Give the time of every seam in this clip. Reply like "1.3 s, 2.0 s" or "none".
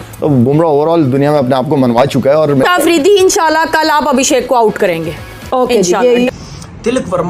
2.6 s, 6.3 s